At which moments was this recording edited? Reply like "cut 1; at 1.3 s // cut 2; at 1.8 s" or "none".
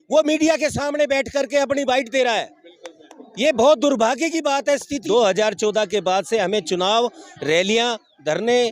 cut 1; at 4.9 s